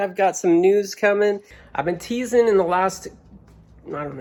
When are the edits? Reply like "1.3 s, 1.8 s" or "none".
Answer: none